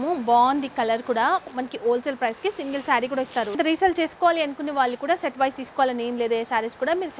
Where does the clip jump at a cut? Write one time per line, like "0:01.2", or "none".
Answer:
0:01.6
0:03.6

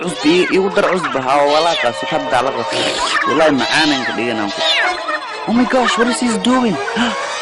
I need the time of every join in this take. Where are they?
none

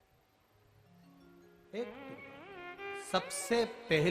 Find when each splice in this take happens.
none

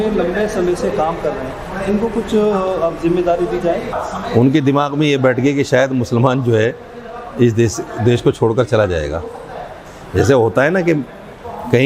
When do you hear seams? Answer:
0:03.9

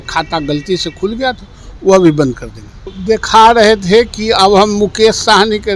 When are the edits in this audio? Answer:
0:02.9

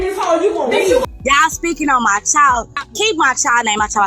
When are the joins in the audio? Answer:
0:01.1

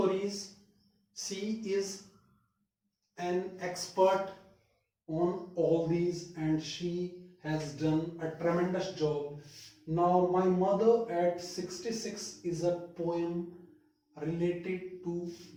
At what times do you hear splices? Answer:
none

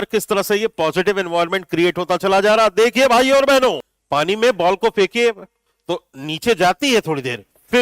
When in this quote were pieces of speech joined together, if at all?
0:03.9

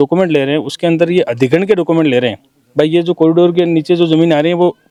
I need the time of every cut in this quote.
none

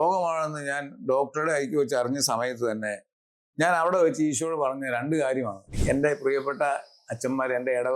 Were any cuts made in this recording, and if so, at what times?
0:05.7

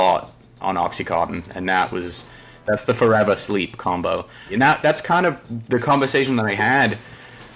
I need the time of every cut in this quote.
0:02.6
0:04.5

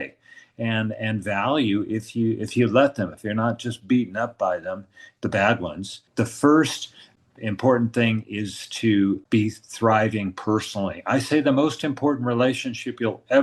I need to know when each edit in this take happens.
0:06.0

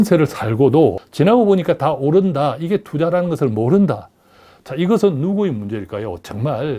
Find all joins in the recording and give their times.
0:01.0

